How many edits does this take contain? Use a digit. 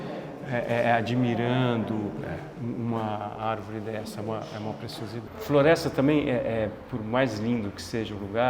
1